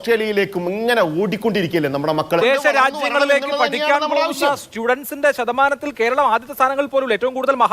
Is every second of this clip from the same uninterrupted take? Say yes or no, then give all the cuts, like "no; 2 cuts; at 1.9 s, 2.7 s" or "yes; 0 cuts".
no; 1 cut; at 2.4 s